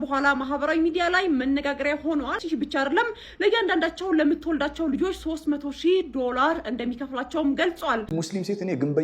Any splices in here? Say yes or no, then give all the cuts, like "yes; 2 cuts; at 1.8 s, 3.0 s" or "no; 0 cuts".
yes; 2 cuts; at 2.4 s, 8.1 s